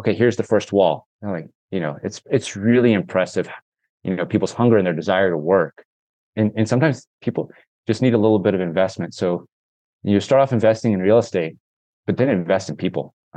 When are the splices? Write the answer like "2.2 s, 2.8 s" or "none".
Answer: none